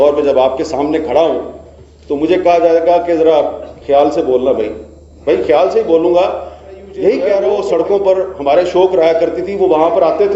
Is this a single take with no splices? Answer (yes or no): no